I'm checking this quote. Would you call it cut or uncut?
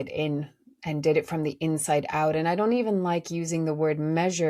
uncut